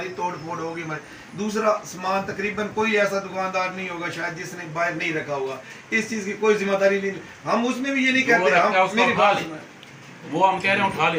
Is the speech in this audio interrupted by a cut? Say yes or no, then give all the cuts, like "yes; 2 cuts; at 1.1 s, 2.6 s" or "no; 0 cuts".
no; 0 cuts